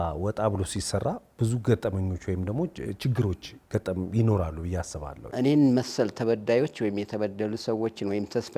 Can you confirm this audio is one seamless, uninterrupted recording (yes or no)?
no